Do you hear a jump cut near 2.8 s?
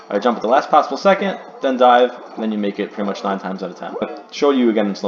no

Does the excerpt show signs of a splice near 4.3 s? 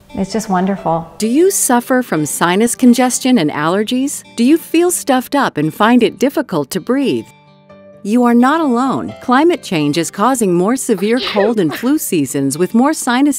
no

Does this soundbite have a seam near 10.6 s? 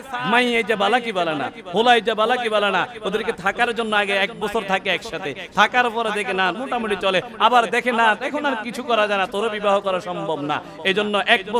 no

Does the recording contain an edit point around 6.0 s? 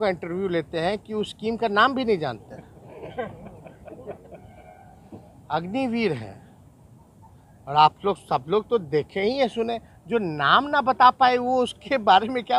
no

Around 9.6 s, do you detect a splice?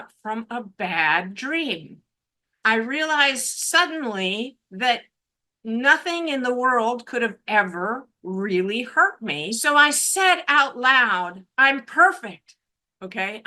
yes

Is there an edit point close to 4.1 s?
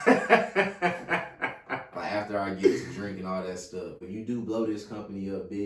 yes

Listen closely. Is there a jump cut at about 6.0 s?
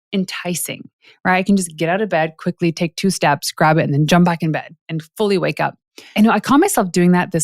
yes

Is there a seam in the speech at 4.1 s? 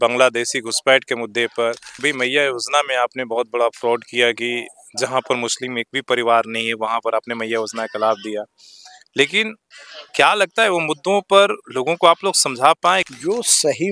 no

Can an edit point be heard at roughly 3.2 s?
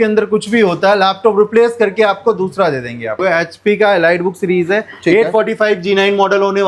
yes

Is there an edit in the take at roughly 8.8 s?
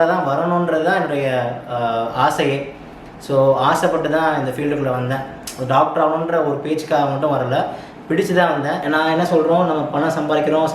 yes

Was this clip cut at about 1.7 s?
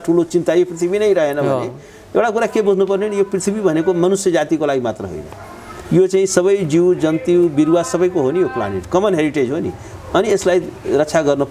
no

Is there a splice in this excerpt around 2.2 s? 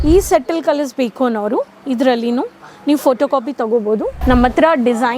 no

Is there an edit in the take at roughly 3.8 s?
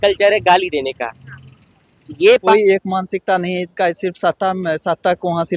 no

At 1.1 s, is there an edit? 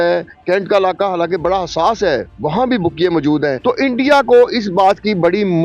no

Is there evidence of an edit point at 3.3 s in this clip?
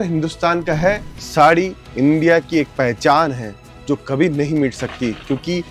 no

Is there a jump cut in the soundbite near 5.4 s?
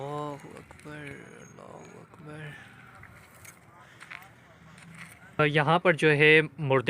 yes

